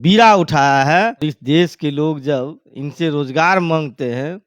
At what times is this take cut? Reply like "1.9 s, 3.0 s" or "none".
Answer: 1.2 s